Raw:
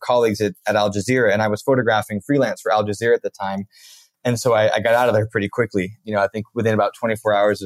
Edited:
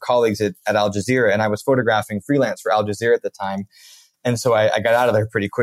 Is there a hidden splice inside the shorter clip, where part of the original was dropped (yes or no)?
no